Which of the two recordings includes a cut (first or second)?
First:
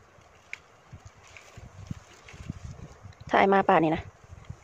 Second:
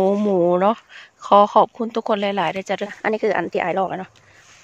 second